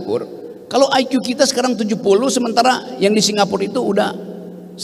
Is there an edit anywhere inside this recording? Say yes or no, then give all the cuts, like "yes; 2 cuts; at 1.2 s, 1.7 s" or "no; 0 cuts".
no; 0 cuts